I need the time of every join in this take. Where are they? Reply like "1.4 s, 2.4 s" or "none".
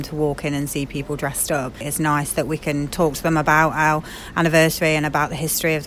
none